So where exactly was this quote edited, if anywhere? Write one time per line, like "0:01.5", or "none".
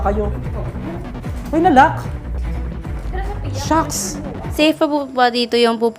0:04.4